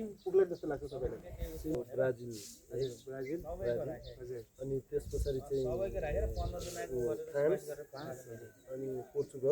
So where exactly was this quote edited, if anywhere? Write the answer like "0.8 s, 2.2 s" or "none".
1.7 s